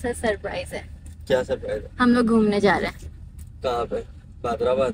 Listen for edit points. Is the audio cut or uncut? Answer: uncut